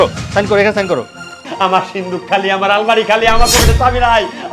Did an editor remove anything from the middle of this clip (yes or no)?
yes